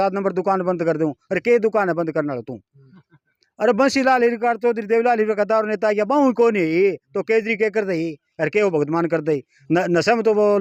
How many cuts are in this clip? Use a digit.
0